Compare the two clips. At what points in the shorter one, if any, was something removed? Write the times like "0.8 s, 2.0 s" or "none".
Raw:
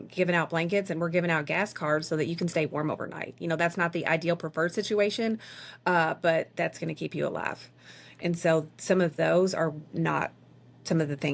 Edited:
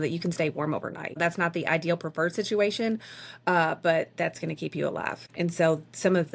1.2 s, 5.2 s